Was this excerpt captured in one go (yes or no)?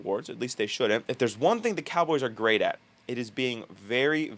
no